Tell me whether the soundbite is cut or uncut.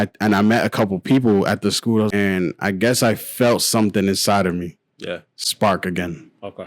cut